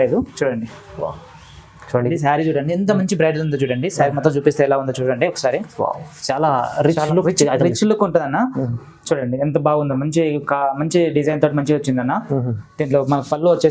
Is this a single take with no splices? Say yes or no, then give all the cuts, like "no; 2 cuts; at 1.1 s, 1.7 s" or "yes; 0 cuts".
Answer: no; 1 cut; at 2.1 s